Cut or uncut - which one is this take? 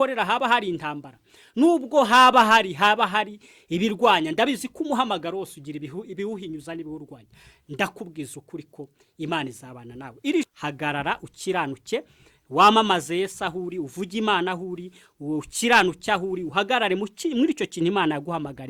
cut